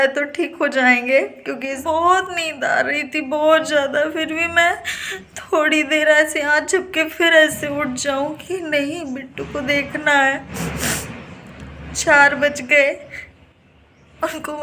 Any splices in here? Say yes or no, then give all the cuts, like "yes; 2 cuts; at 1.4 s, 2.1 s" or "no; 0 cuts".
yes; 1 cut; at 1.8 s